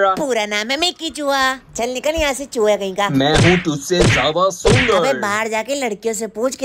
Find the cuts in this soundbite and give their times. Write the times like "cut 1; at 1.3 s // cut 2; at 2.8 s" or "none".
none